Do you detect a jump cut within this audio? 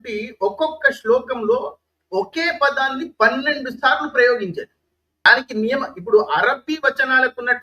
yes; 1 cut; at 5.3 s

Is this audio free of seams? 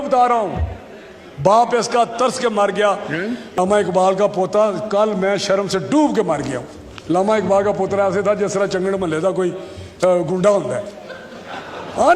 no; 1 cut; at 3.4 s

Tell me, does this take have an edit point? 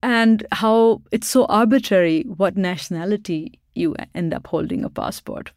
no; 0 cuts

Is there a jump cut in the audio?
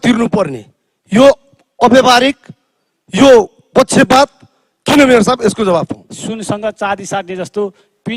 yes; 1 cut; at 6.1 s

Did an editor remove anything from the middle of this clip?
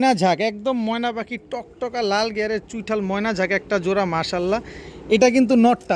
no; 0 cuts

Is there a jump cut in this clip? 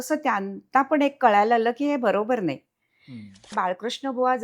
yes; 1 cut; at 3.6 s

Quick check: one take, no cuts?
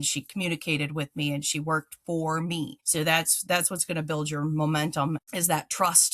no; 2 cuts; at 2.8 s, 5.2 s

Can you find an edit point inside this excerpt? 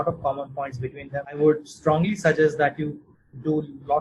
yes; 1 cut; at 1.4 s

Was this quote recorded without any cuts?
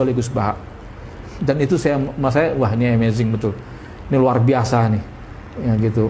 yes; 0 cuts

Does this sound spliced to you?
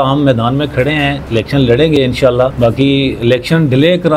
yes; 2 cuts; at 1.2 s, 2.5 s

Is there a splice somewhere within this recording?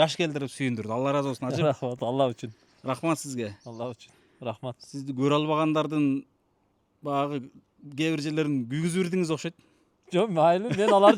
no; 0 cuts

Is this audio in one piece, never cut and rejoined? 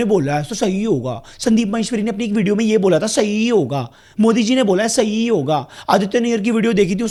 yes; 0 cuts

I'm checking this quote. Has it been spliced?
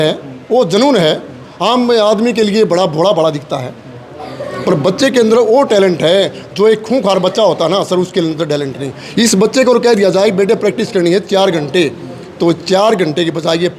no; 0 cuts

